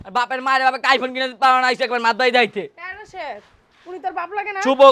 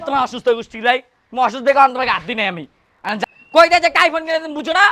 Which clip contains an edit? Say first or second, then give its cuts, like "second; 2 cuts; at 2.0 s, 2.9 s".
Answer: second; 1 cut; at 3.2 s